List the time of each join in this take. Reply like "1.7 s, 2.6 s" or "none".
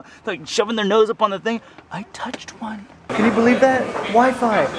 3.1 s

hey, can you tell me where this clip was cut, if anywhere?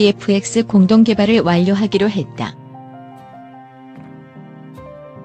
none

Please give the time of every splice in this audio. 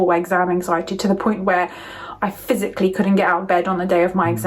none

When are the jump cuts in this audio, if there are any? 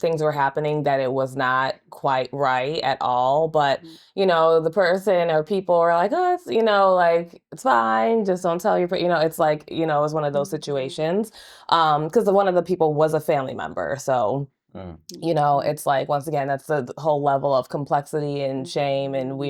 none

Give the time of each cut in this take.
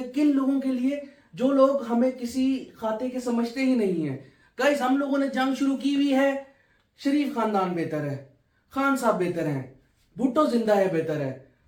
none

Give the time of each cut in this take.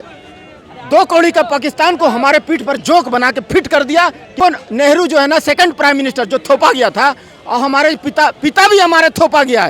4.3 s

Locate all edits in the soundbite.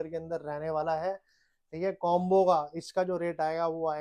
none

